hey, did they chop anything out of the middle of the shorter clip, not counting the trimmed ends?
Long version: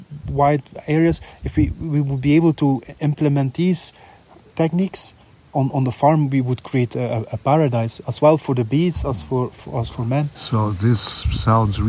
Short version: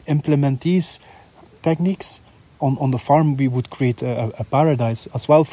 no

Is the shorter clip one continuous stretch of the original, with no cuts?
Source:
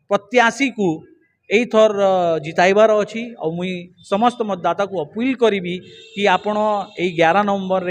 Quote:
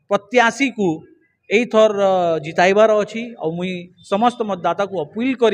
yes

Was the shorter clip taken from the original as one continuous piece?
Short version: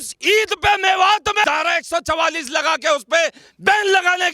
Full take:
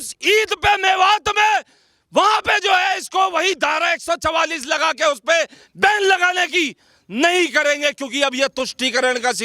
no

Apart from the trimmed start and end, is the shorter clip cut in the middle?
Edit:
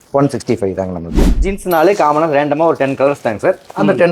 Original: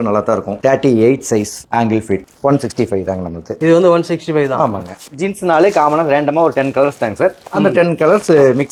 yes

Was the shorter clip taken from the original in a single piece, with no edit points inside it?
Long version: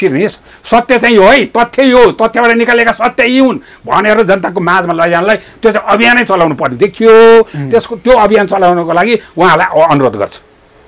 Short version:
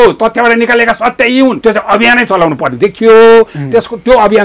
no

